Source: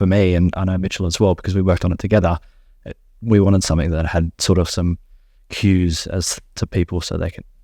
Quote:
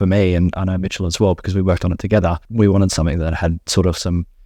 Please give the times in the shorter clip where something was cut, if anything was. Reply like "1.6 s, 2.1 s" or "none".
2.4 s